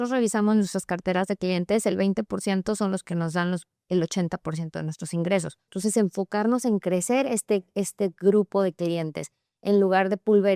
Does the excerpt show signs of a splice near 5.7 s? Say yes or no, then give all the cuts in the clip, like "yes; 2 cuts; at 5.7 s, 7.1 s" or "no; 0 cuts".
yes; 1 cut; at 5.7 s